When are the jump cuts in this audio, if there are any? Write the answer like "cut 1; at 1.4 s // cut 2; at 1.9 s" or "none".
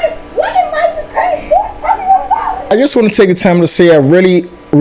cut 1; at 2.7 s